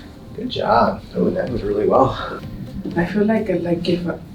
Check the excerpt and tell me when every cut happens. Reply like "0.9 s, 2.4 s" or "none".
2.3 s